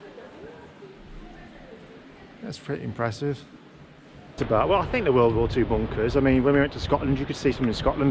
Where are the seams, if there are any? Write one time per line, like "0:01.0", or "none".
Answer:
0:04.3